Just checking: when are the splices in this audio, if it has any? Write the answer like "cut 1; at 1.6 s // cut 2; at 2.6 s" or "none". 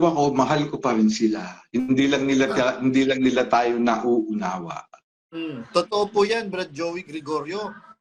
none

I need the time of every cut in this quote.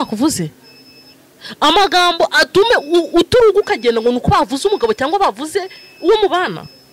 none

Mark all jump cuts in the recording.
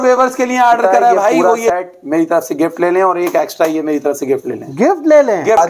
cut 1; at 1.3 s

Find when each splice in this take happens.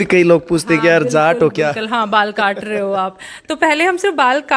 none

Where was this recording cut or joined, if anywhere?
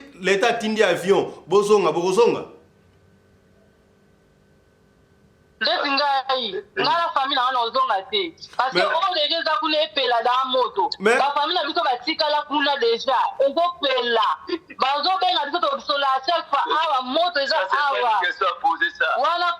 none

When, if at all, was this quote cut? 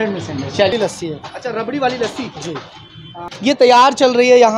cut 1; at 0.7 s // cut 2; at 3.1 s

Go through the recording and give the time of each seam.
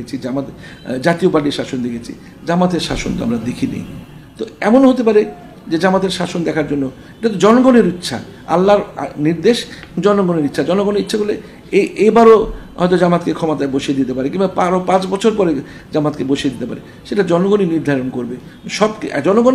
none

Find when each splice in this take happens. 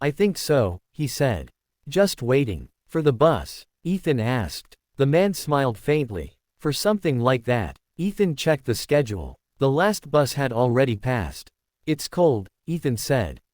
cut 1; at 1.2 s

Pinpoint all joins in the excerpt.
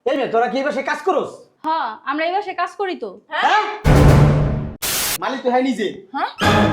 cut 1; at 5.1 s

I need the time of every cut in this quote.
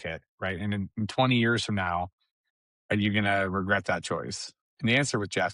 none

